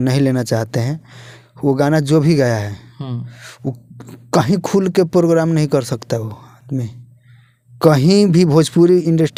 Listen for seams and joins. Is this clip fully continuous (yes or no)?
yes